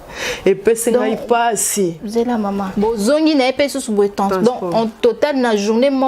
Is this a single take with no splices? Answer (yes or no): no